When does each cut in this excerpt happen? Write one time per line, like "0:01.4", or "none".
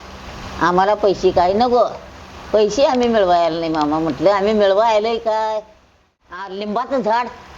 0:06.5